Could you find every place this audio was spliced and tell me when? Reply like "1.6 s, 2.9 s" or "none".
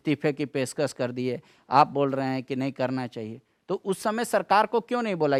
none

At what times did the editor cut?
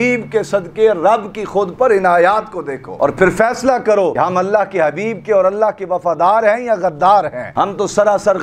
none

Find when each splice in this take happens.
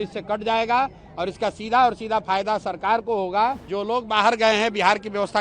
3.7 s

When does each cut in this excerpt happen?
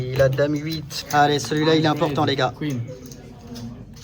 0.9 s

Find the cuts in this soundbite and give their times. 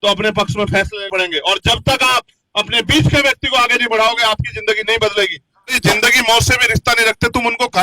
1.0 s, 5.7 s

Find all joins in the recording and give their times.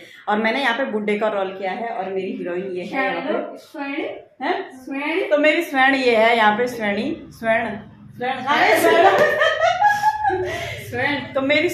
none

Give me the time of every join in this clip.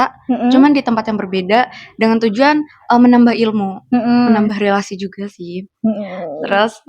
4.3 s

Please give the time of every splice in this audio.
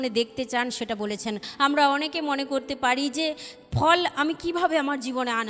1.5 s

